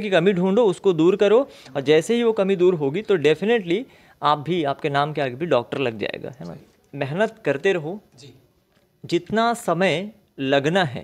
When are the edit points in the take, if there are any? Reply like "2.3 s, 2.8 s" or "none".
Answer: 6.6 s